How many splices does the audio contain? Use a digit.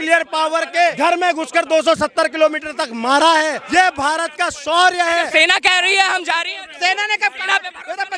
3